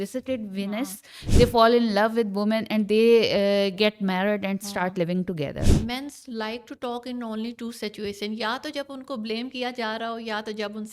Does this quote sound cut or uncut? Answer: cut